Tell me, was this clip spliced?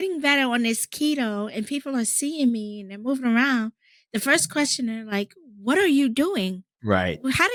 no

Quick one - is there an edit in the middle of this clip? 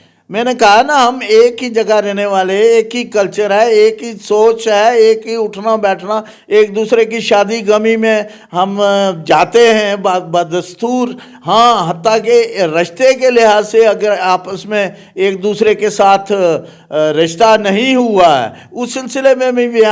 no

